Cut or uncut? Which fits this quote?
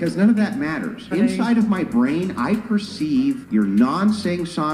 uncut